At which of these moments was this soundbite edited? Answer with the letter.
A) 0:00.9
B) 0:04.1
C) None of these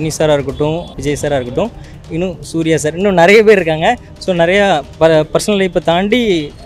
A